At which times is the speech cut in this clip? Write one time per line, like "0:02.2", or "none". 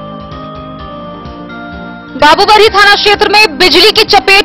0:01.9